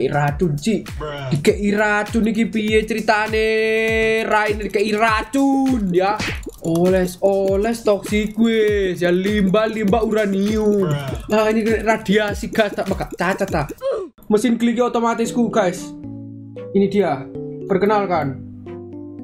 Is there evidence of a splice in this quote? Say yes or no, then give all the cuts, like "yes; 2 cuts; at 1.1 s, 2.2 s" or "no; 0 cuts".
yes; 1 cut; at 13.9 s